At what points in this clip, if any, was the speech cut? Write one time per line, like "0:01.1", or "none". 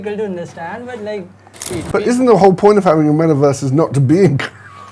0:01.6